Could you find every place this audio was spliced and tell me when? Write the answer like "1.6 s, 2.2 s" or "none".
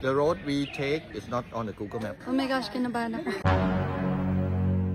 2.2 s